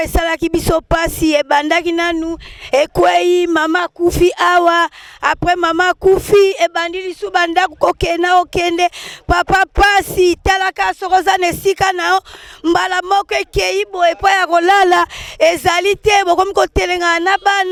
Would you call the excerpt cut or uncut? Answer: uncut